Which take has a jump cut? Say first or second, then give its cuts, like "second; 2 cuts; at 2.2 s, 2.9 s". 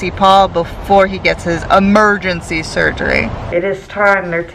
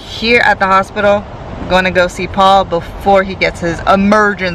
first; 1 cut; at 3.4 s